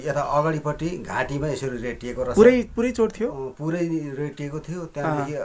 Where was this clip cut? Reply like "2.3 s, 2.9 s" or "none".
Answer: none